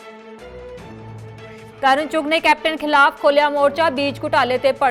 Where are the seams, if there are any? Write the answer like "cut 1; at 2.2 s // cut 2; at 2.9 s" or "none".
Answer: cut 1; at 1.5 s